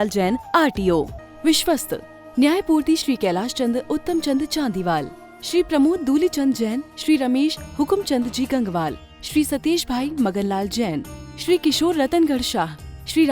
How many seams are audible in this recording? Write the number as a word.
one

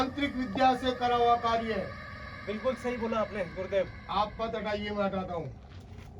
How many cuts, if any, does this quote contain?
zero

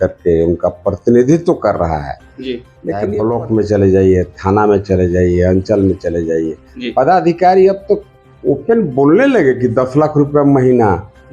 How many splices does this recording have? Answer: one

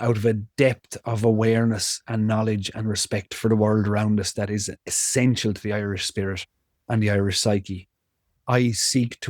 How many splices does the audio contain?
one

